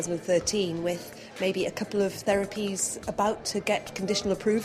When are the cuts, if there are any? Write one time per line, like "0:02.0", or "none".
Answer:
none

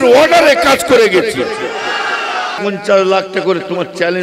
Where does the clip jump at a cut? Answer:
0:02.5

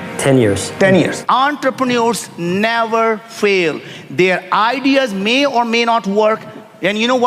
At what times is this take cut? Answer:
0:01.2

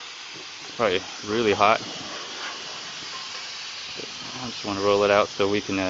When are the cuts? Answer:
0:01.1

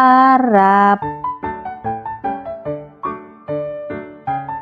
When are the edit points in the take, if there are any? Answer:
0:01.1

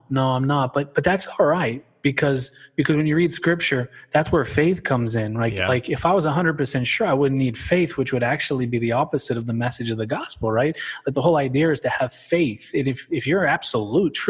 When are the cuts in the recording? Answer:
none

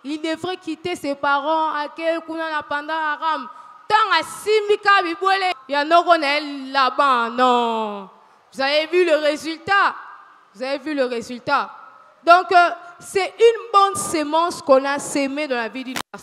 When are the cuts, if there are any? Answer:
0:05.5

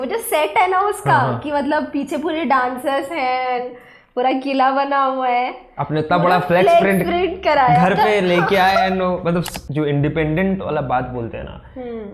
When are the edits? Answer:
0:09.6

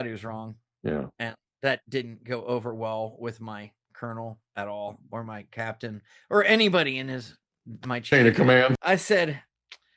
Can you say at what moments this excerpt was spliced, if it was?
0:08.8

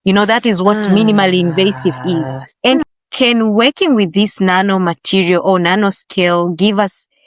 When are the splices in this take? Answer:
0:02.8

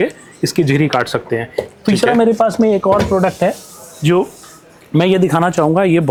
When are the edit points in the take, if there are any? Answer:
none

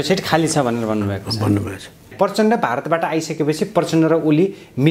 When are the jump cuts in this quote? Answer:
0:02.1

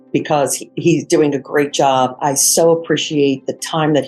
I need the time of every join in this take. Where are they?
0:02.2

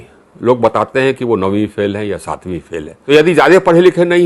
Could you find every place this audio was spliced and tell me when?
0:02.9

